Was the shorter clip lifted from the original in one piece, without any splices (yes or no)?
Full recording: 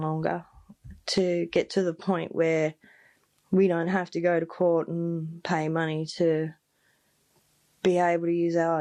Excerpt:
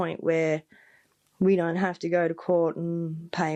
yes